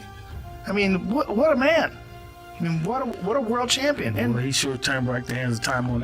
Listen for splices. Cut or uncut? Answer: uncut